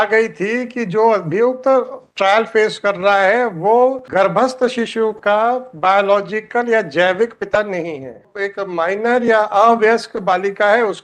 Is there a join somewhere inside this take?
yes; 2 cuts; at 4.0 s, 8.4 s

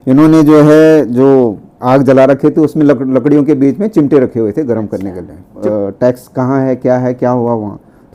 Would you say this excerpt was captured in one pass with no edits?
no; 1 cut; at 5.5 s

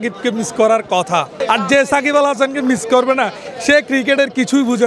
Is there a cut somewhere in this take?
yes; 1 cut; at 1.3 s

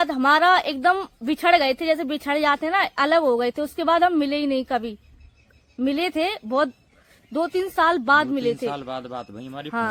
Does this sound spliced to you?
no; 0 cuts

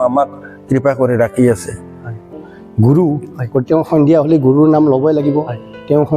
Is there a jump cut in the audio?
yes; 1 cut; at 2.3 s

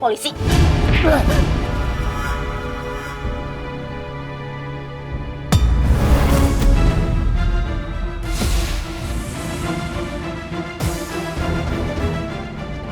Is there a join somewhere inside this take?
yes; 1 cut; at 9.1 s

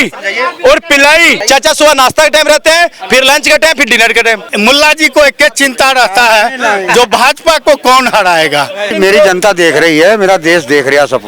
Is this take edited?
yes; 3 cuts; at 1.4 s, 4.5 s, 8.9 s

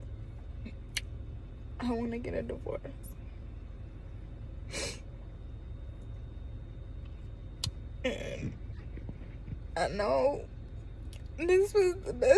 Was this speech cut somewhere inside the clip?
no; 0 cuts

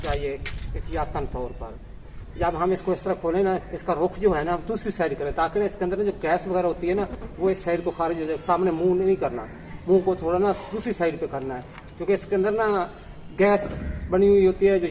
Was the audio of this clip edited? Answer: no; 0 cuts

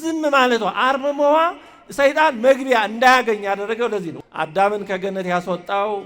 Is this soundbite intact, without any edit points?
no; 1 cut; at 4.2 s

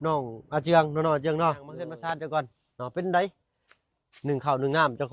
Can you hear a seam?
yes; 1 cut; at 1.8 s

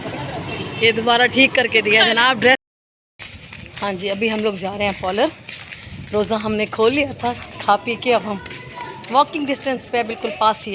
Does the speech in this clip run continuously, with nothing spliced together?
no; 1 cut; at 2.6 s

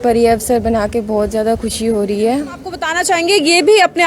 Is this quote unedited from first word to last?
no; 1 cut; at 2.9 s

